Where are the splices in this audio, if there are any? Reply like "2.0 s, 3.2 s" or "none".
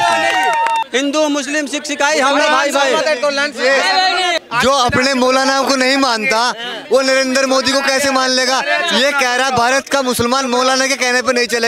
0.8 s, 4.4 s